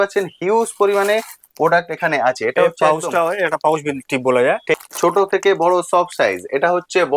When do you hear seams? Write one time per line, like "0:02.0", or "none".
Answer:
0:04.7